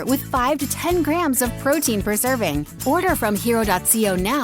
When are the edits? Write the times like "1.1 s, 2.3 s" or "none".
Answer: 2.7 s